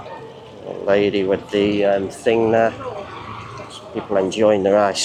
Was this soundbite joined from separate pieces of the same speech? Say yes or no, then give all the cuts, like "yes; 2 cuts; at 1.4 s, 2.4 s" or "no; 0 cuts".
no; 0 cuts